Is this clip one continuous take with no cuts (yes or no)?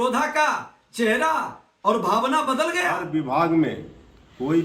no